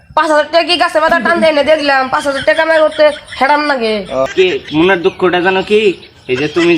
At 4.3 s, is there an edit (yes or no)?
yes